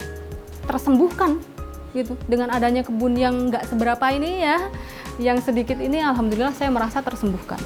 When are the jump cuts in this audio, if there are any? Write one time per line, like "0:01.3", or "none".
none